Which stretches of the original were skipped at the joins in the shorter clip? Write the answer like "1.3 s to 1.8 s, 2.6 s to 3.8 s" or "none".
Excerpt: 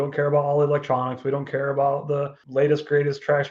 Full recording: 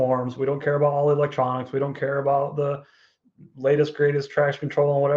2.9 s to 3.5 s